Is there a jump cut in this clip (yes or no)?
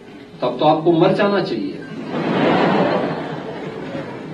no